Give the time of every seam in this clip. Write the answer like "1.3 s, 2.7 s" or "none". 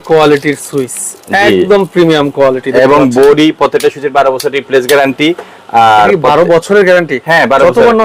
none